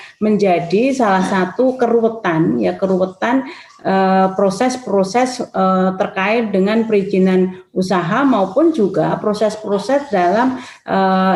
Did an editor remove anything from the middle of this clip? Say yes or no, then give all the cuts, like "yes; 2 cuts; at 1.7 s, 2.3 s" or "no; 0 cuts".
no; 0 cuts